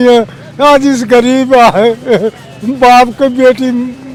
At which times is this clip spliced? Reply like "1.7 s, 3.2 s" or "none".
none